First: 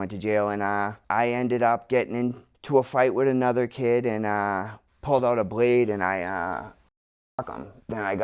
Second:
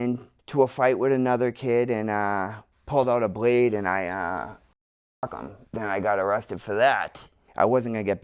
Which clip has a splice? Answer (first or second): first